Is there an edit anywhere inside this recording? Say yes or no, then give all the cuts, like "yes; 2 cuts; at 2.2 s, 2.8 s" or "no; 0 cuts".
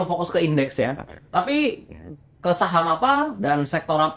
no; 0 cuts